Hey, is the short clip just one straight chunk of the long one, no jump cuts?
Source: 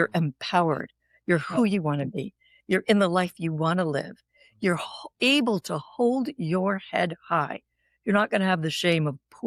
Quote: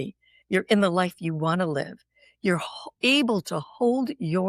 yes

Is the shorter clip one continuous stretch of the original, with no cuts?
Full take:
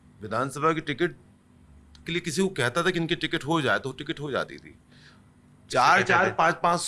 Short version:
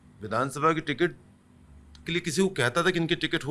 yes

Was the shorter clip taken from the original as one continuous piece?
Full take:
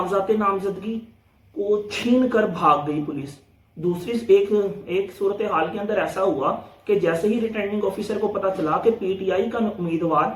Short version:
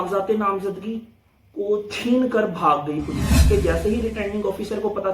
no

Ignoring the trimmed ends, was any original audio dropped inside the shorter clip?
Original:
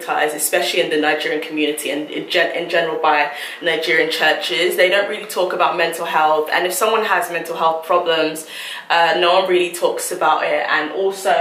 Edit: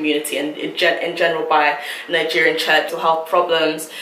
yes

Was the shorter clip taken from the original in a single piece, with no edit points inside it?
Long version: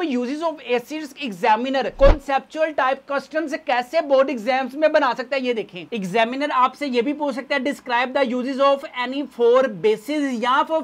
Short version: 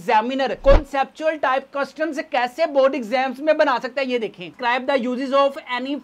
no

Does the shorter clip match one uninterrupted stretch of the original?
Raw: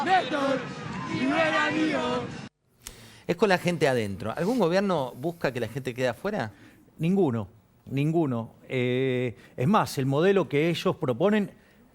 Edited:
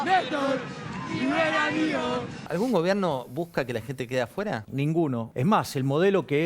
no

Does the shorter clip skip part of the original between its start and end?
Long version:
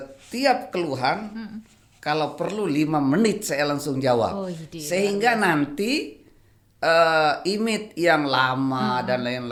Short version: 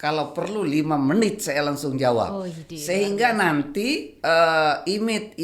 yes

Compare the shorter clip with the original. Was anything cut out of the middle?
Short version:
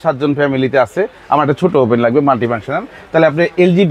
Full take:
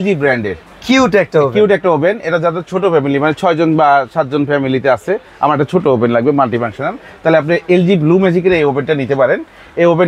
no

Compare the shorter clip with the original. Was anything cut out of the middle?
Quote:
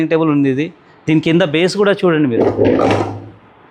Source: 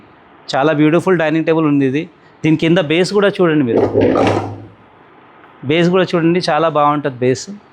no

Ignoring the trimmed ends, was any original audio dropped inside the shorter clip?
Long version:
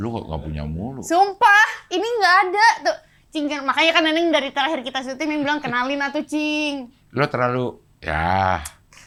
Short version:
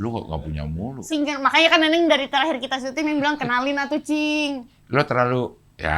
yes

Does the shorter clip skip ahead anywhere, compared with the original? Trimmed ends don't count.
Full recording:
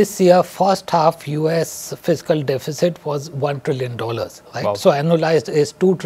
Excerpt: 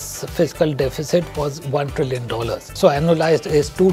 yes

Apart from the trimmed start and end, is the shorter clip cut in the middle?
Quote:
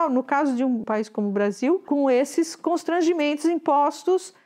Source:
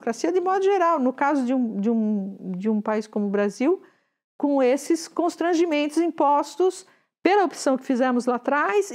yes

